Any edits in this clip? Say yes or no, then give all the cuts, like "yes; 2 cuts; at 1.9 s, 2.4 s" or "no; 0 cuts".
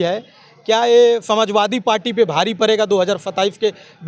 no; 0 cuts